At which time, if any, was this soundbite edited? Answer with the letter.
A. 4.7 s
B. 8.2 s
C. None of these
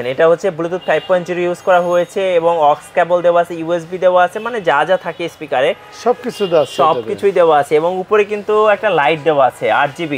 C